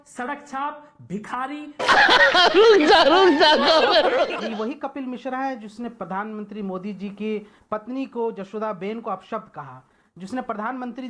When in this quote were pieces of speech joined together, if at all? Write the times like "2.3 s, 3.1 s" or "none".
4.3 s

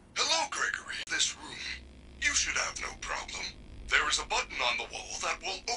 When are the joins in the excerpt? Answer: 1.0 s

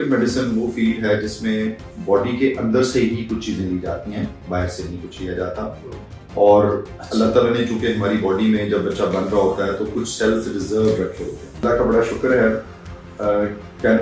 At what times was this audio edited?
11.6 s

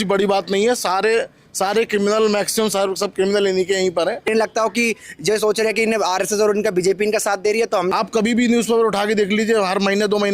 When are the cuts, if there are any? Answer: 4.3 s, 7.9 s

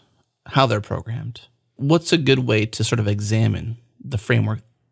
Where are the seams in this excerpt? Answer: 1.7 s

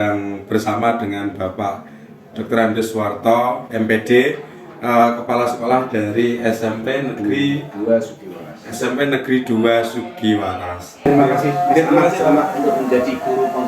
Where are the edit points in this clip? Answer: 11.0 s

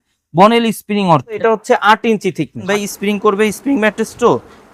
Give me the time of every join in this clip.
1.4 s, 2.6 s

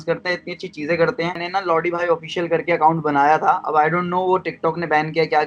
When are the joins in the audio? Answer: 1.4 s

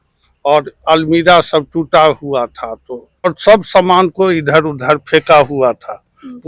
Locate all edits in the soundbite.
3.3 s

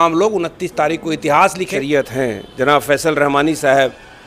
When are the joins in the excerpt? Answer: 1.7 s

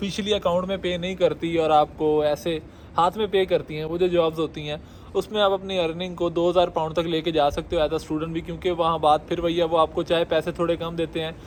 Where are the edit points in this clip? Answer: none

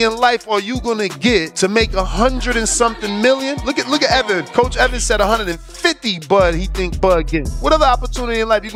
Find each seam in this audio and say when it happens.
none

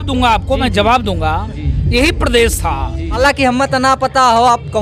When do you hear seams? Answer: 3.2 s

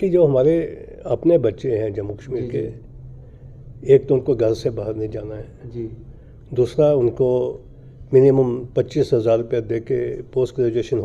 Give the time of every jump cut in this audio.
none

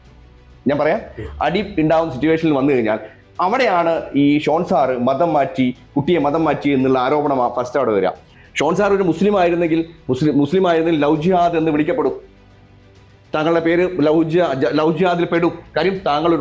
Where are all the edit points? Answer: 8.3 s

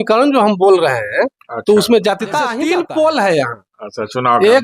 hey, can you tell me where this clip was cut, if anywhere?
2.5 s

